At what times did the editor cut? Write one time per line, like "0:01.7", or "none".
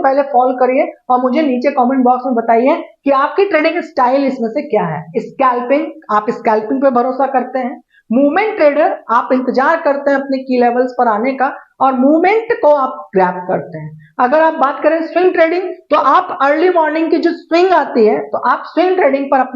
none